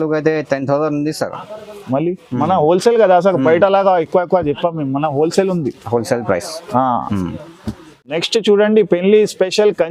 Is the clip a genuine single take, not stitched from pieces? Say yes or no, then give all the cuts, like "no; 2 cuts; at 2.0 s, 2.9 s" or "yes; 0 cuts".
yes; 0 cuts